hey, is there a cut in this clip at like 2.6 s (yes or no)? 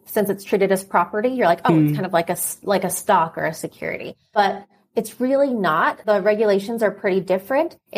no